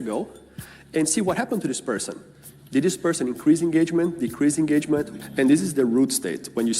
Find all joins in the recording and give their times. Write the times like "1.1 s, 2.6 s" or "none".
5.2 s